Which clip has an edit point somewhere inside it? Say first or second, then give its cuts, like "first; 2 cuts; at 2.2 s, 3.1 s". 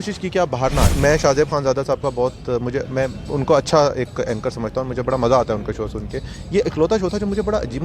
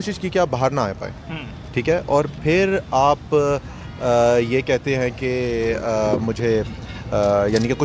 first; 1 cut; at 0.9 s